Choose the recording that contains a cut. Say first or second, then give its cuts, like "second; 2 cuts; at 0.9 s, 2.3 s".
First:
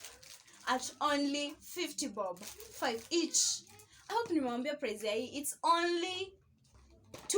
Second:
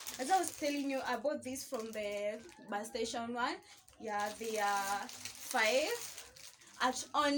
first; 1 cut; at 4.1 s